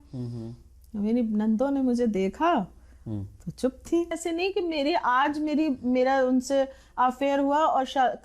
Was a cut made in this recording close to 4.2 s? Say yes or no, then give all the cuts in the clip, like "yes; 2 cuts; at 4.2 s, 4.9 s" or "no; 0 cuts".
yes; 1 cut; at 4.2 s